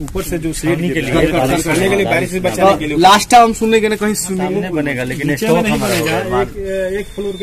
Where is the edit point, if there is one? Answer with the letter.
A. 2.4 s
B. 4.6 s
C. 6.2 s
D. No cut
B